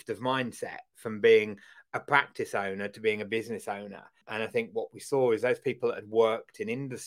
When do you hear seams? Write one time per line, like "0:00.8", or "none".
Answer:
0:04.2